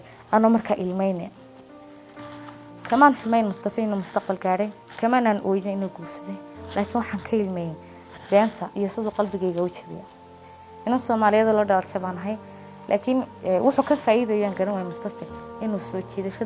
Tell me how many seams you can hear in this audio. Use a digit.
0